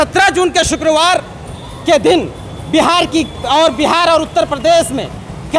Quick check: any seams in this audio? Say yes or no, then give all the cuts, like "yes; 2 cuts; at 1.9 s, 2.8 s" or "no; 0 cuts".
no; 0 cuts